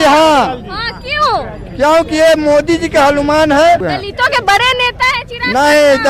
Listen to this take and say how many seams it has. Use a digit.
1